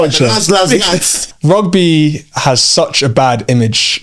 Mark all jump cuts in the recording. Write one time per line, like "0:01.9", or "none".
0:01.1